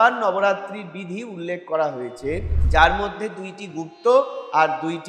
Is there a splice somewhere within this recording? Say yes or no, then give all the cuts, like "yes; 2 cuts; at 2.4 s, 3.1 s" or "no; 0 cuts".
no; 0 cuts